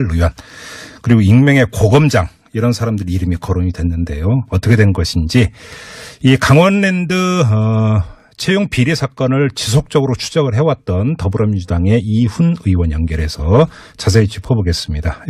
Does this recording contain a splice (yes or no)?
no